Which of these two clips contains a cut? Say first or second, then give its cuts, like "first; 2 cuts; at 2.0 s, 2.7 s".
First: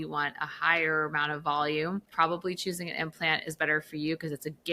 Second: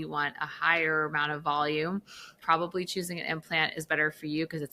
first; 1 cut; at 2.1 s